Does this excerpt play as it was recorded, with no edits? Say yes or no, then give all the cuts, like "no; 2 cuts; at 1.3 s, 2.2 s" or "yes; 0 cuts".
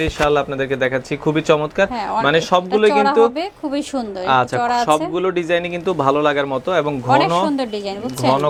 yes; 0 cuts